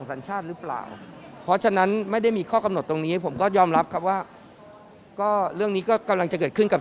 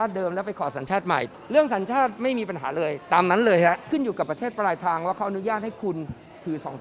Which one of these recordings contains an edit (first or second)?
second